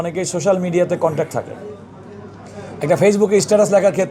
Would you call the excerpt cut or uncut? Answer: uncut